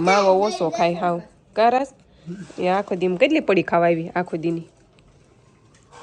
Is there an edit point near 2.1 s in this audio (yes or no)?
no